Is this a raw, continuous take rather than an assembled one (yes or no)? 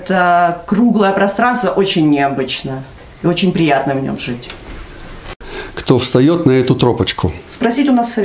no